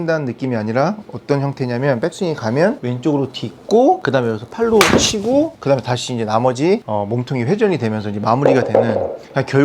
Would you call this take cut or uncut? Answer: cut